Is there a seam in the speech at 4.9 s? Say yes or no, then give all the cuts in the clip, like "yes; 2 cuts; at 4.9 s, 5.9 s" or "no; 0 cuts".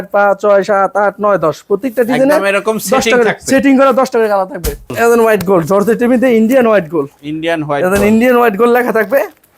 yes; 1 cut; at 4.9 s